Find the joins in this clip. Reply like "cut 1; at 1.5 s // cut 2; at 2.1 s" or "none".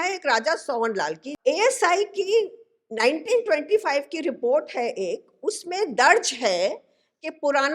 cut 1; at 1.3 s

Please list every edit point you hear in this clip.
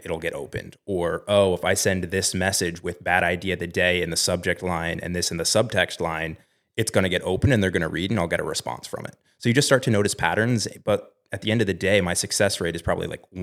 none

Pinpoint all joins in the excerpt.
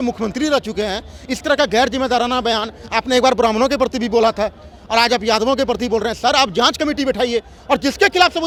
none

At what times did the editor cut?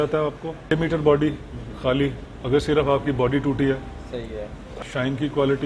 cut 1; at 0.7 s // cut 2; at 4.7 s

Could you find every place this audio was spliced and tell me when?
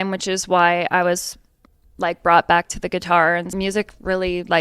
cut 1; at 3.5 s

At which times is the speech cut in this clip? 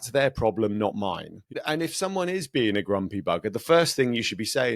cut 1; at 1.6 s

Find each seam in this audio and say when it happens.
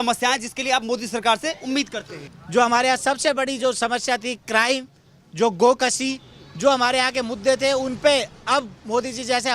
cut 1; at 2.2 s

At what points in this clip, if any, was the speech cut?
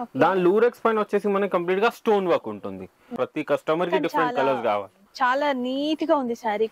cut 1; at 3.1 s

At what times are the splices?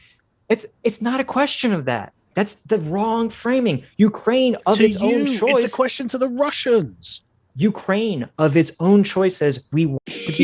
none

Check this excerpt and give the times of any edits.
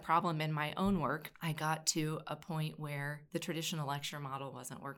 cut 1; at 1.3 s // cut 2; at 3.2 s

